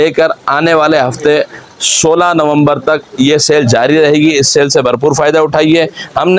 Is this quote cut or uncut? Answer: uncut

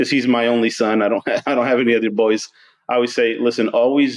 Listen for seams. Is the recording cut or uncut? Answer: uncut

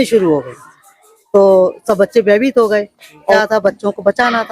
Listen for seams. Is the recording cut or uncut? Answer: cut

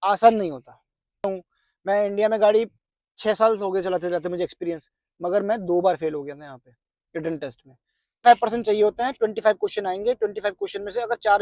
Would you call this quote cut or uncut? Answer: cut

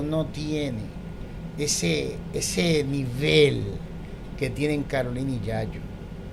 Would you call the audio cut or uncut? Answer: uncut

